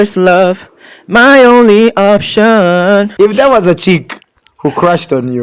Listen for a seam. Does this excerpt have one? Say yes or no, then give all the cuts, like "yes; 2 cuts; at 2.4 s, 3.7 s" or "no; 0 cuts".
yes; 1 cut; at 3.1 s